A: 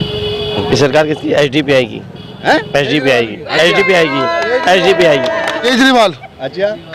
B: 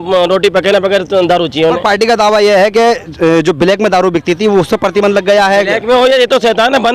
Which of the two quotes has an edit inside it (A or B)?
A